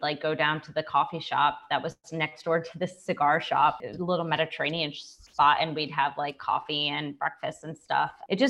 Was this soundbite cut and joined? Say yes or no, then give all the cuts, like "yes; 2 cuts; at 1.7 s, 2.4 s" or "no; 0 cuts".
no; 0 cuts